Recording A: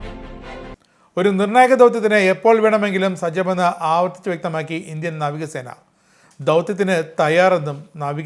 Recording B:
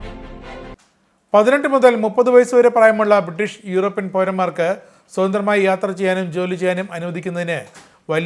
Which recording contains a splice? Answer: A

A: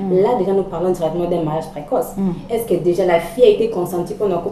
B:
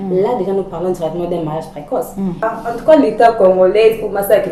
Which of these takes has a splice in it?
B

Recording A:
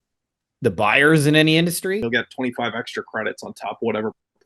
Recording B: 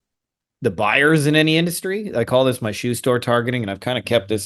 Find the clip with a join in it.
A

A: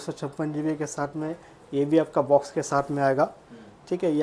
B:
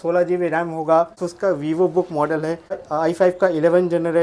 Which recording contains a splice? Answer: B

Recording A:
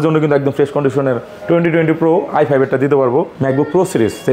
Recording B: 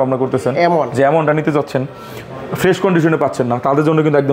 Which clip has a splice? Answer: A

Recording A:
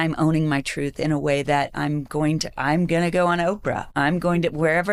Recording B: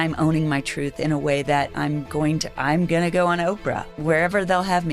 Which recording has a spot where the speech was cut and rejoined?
B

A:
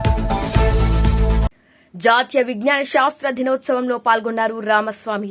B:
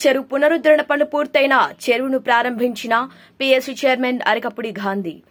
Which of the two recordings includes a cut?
A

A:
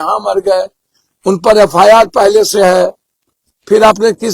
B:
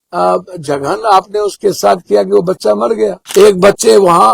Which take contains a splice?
B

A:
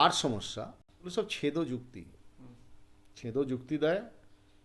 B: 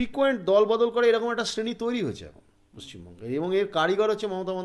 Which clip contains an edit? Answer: A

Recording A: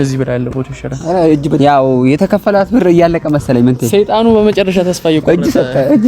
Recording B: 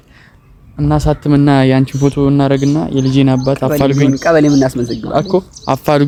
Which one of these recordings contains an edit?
A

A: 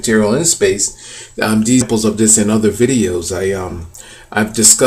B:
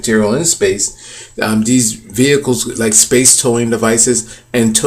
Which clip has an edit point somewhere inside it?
B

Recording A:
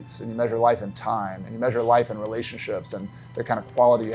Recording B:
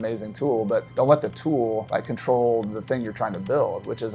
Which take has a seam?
B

